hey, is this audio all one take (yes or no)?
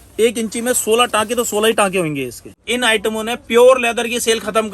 no